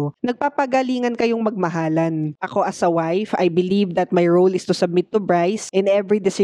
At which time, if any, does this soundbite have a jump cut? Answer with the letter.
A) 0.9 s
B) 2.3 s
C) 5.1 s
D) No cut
B